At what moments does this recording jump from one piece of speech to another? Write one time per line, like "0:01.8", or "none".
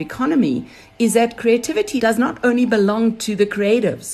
0:01.9